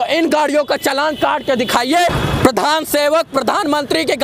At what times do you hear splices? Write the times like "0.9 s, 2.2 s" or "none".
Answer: 2.2 s